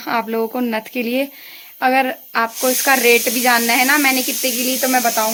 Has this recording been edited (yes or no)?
no